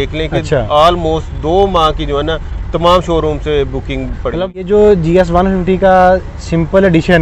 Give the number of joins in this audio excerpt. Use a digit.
1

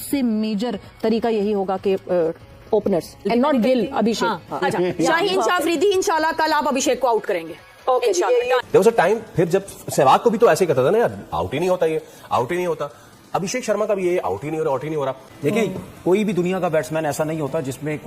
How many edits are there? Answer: 3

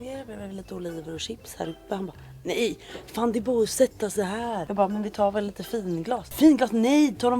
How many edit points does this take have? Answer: 2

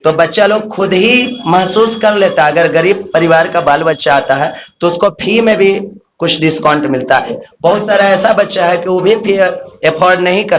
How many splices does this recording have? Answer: 1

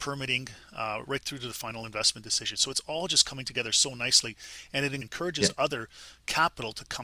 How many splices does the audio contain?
1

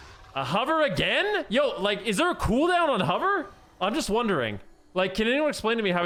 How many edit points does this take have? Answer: 0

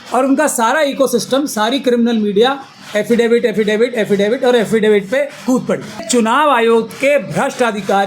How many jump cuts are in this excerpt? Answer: 1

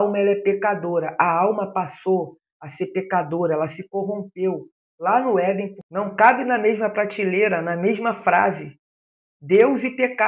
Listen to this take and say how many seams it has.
1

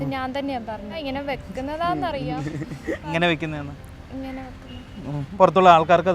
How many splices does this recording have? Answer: 3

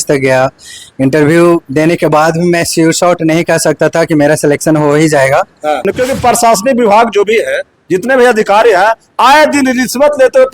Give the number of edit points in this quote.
1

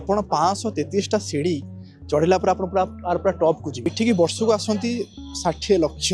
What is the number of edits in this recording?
1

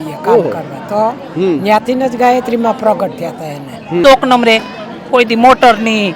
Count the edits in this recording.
1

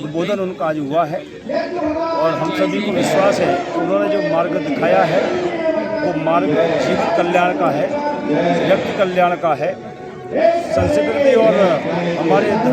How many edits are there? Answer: 0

